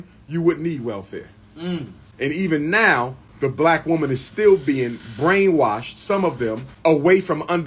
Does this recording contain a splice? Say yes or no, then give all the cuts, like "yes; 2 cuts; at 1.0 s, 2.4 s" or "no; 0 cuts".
yes; 3 cuts; at 2.0 s, 3.2 s, 6.7 s